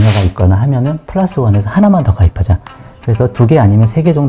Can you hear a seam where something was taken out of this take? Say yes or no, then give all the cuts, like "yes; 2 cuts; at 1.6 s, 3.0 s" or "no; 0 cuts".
no; 0 cuts